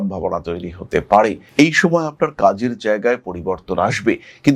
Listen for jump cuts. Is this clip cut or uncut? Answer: cut